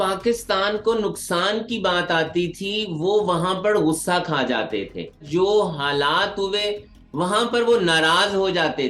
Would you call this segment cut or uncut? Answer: cut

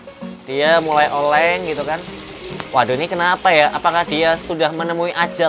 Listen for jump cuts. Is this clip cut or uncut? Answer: uncut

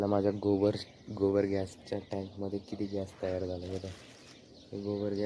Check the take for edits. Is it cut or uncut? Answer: uncut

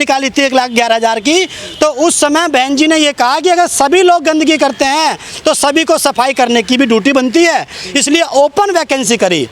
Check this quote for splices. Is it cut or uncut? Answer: uncut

